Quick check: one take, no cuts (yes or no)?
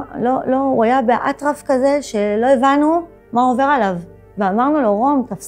yes